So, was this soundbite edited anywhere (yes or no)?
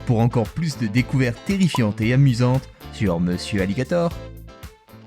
yes